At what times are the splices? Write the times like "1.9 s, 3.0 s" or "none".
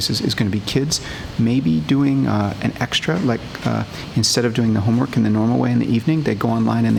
none